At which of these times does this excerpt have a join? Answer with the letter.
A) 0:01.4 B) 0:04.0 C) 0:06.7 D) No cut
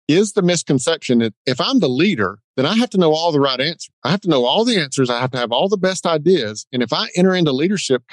A